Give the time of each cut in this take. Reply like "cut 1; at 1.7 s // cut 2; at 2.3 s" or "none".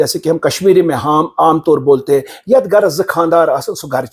none